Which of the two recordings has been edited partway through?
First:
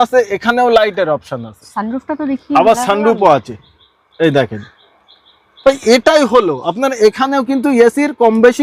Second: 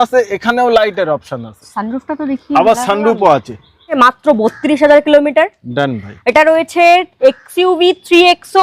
second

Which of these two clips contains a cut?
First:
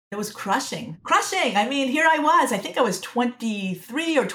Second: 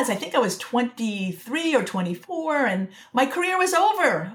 first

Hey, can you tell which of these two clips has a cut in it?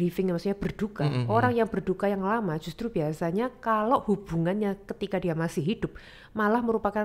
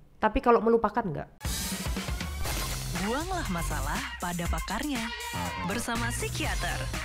second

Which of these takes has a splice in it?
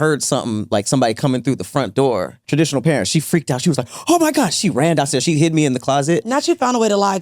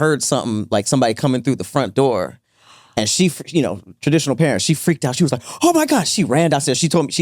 first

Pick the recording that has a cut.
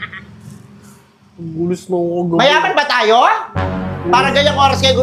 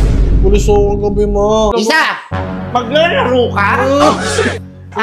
second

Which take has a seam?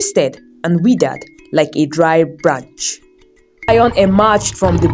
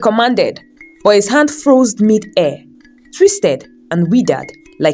first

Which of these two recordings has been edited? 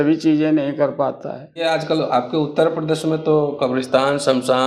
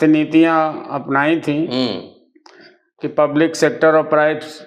first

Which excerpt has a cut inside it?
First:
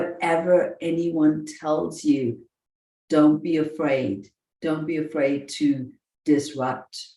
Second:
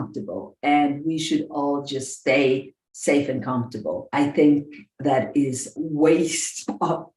second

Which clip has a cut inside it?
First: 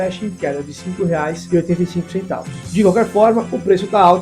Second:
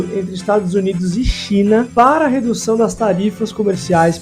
first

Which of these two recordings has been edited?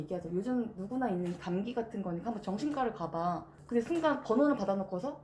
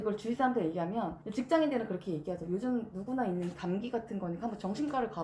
second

